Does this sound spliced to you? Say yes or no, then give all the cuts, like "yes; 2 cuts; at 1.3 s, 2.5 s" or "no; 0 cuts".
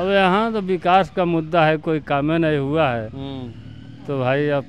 no; 0 cuts